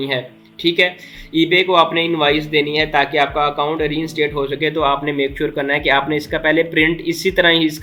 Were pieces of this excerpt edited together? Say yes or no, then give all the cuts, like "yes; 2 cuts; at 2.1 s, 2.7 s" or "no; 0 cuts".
no; 0 cuts